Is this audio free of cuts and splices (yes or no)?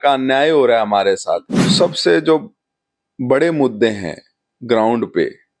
no